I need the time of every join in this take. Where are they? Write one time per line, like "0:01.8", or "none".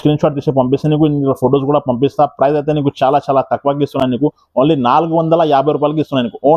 none